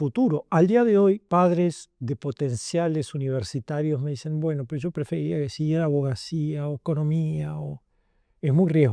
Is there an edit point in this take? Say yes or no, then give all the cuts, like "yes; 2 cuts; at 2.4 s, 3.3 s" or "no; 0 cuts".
yes; 2 cuts; at 1.2 s, 6.8 s